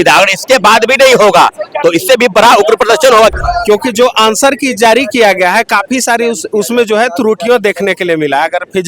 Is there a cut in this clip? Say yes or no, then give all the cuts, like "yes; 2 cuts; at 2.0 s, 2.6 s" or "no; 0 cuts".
yes; 1 cut; at 3.3 s